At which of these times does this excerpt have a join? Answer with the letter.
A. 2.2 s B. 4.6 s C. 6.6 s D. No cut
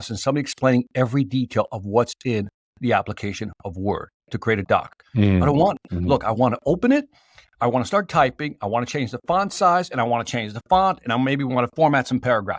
B